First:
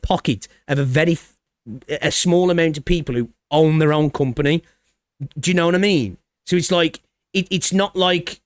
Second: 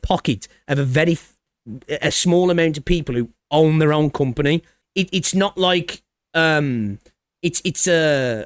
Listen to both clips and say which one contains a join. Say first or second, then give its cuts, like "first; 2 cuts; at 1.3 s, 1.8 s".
second; 1 cut; at 4.8 s